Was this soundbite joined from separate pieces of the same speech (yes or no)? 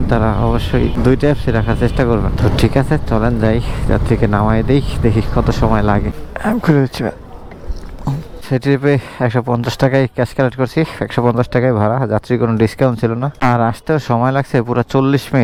no